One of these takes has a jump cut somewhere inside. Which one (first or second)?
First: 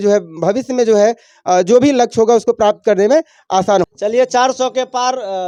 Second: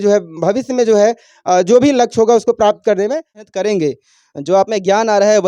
second